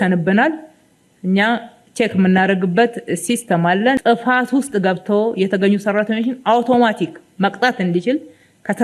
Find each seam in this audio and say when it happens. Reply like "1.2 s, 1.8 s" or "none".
4.0 s